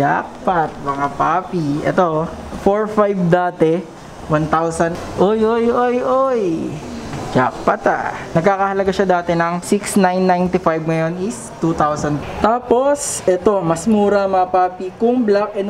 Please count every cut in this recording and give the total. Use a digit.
4